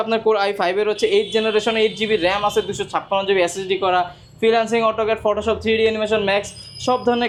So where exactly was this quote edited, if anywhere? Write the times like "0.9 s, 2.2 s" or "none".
none